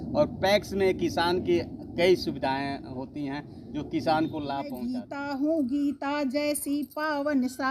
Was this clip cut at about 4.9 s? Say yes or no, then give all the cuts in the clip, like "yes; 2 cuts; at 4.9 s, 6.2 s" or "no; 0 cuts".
yes; 1 cut; at 4.9 s